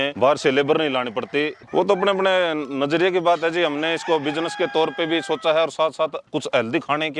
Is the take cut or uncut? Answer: cut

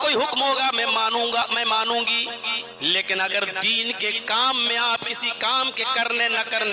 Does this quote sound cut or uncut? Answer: uncut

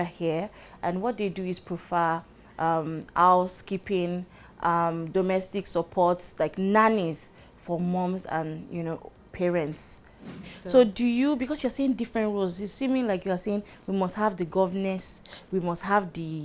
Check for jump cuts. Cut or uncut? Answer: cut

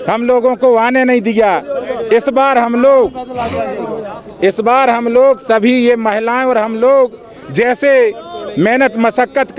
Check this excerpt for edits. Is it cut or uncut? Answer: uncut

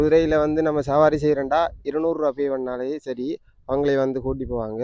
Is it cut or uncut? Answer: uncut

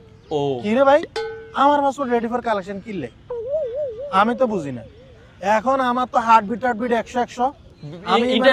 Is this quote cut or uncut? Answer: uncut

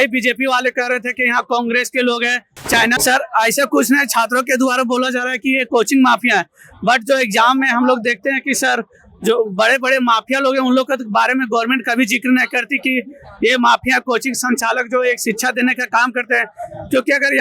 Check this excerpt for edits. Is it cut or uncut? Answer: cut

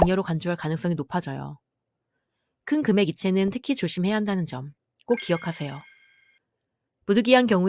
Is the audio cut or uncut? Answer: uncut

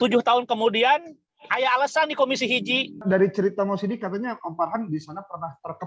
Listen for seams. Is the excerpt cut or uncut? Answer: cut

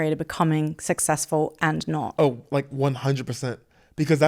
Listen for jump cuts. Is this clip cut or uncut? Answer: cut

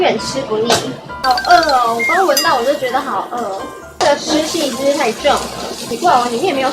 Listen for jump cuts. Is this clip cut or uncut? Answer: cut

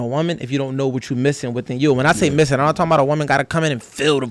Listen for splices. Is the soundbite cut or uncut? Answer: uncut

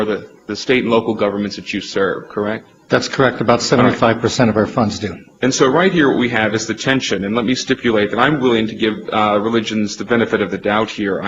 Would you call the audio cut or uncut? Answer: uncut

